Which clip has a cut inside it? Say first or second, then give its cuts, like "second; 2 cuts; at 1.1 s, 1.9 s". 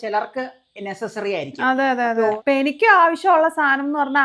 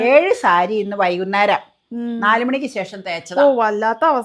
first; 1 cut; at 2.3 s